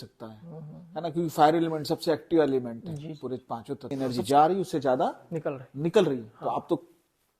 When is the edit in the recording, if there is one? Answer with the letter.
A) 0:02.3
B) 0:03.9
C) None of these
B